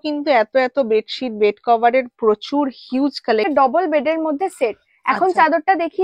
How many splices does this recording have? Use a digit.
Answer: 1